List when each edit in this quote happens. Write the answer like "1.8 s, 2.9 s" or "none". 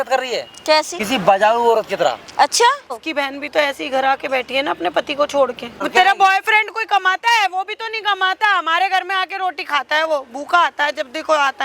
1.0 s, 3.0 s, 5.9 s